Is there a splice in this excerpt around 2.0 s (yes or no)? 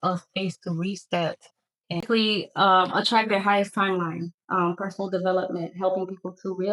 yes